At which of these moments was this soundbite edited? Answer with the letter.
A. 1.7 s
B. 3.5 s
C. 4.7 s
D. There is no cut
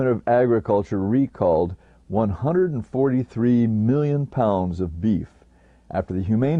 D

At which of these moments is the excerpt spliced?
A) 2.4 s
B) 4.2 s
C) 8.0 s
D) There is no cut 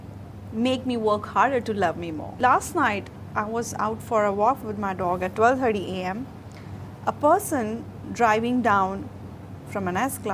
A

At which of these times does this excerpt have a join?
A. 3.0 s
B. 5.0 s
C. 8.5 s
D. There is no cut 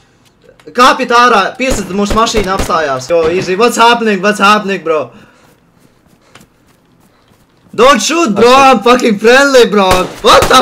A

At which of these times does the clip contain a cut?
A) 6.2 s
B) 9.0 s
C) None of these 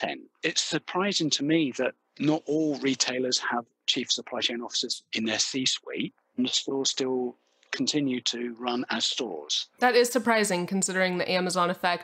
C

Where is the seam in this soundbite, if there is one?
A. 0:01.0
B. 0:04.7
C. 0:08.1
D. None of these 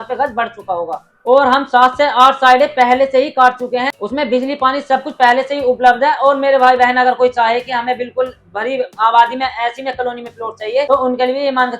A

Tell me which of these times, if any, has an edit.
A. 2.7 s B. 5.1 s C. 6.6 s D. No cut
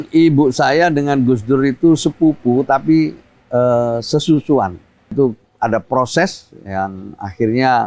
B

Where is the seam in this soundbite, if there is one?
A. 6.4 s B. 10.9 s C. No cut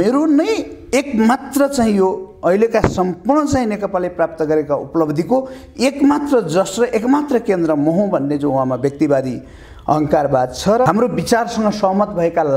B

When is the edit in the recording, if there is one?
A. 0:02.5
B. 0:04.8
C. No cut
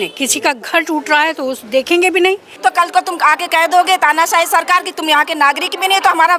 A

